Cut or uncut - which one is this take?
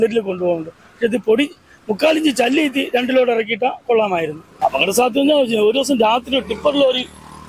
cut